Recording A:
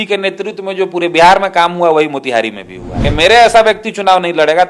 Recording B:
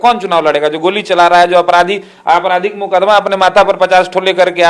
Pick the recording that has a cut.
A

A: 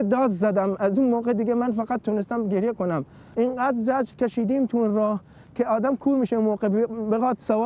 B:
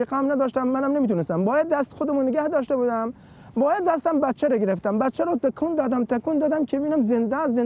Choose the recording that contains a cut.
A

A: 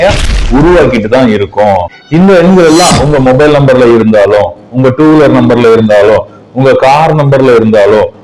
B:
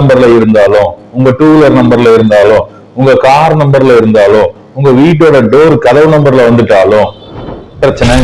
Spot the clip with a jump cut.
A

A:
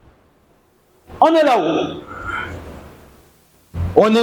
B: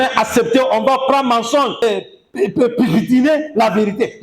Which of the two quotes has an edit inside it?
B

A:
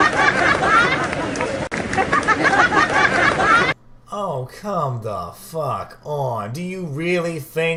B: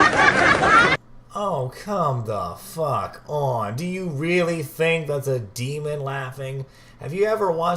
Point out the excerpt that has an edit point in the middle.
B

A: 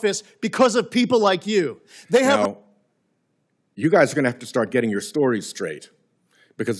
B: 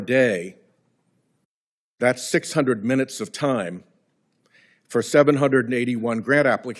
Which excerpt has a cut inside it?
A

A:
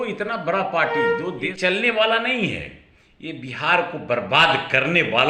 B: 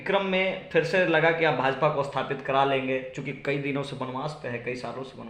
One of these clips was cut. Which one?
A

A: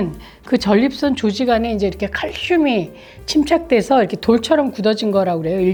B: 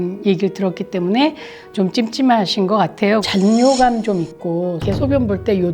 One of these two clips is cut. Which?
B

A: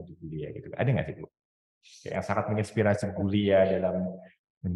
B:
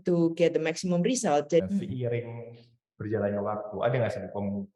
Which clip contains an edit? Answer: B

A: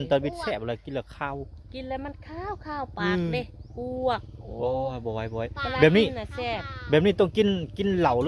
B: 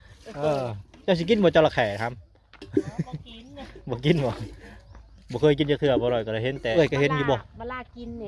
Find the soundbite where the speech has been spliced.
B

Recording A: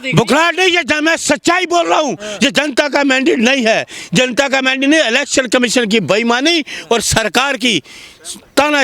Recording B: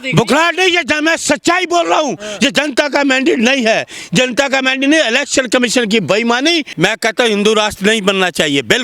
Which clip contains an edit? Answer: B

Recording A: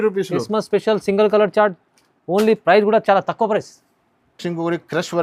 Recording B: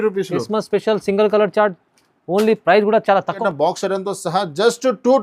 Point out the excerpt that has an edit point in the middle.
B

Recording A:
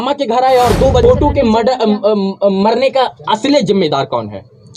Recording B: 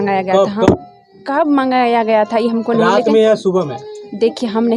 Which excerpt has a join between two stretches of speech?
A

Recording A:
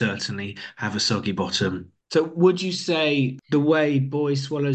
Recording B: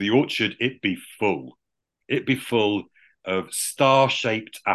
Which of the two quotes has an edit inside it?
A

